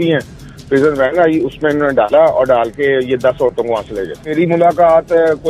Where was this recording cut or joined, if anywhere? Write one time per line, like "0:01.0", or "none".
0:04.3